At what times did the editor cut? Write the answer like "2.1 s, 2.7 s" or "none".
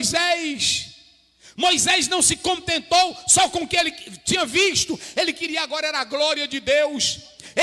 none